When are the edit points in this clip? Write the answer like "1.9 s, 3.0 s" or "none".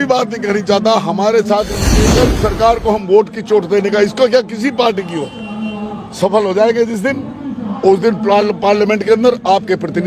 1.9 s